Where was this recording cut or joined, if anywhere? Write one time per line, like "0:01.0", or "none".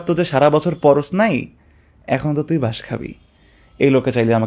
none